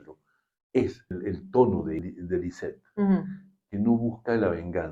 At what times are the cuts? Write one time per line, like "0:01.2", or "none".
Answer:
0:01.1
0:02.0